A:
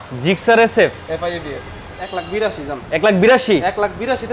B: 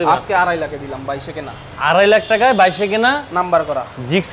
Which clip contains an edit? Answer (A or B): A